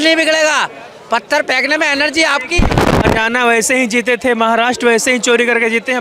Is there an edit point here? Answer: no; 0 cuts

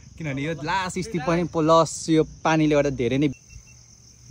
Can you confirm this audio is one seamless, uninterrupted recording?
no; 1 cut; at 3.3 s

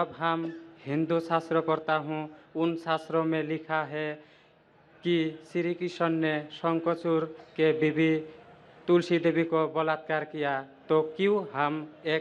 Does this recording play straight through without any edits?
yes; 0 cuts

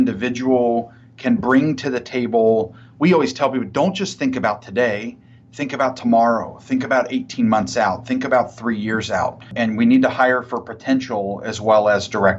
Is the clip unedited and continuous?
no; 1 cut; at 9.5 s

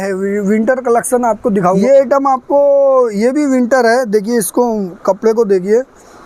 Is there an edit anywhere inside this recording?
yes; 1 cut; at 1.8 s

